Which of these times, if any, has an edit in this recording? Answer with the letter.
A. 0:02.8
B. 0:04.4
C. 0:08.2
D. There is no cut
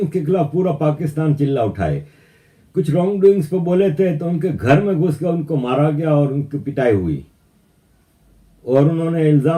D